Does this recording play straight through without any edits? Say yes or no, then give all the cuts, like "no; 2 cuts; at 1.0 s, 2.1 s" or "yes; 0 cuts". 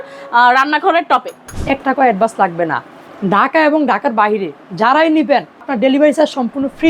no; 2 cuts; at 1.5 s, 5.7 s